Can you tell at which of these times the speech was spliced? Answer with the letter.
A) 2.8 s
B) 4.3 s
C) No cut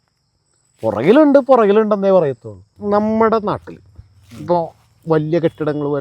A